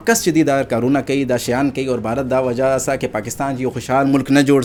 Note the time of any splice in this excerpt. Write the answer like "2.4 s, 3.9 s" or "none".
none

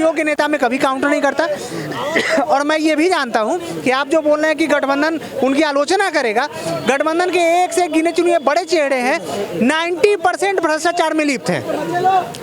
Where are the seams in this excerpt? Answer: none

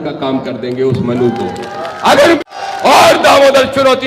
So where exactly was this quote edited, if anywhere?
2.4 s

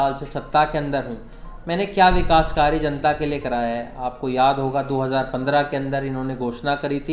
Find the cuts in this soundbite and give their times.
none

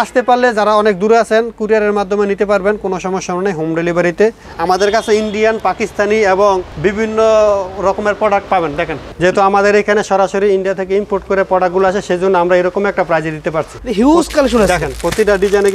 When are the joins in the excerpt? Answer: 4.5 s, 8.9 s, 13.8 s

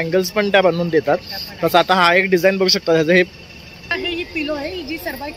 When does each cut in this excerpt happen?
3.9 s

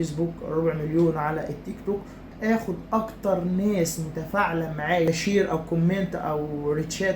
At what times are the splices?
2.3 s, 5.1 s

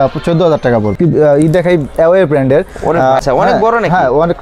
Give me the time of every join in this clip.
1.0 s, 3.2 s

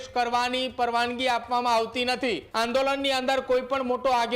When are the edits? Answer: 2.4 s

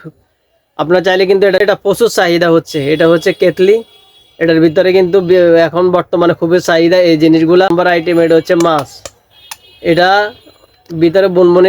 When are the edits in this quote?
1.6 s, 7.7 s

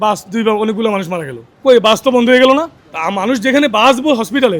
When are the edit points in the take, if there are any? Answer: none

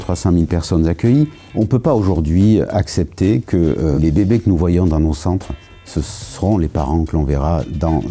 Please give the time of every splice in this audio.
1.4 s, 4.0 s

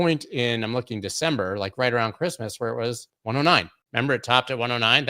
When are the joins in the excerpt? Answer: 3.1 s, 3.8 s

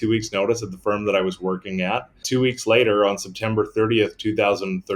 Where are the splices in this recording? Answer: 2.2 s

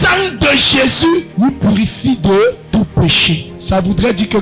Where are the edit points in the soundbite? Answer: 1.3 s, 2.6 s, 3.5 s

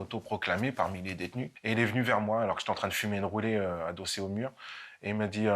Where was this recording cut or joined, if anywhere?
1.5 s

